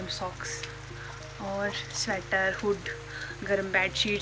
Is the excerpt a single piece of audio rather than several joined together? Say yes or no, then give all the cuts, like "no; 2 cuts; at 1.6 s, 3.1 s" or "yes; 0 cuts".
yes; 0 cuts